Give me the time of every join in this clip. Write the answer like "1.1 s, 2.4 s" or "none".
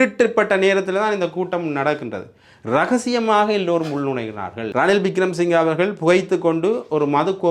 4.6 s